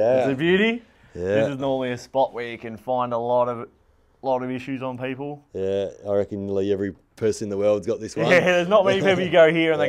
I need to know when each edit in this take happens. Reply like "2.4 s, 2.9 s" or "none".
none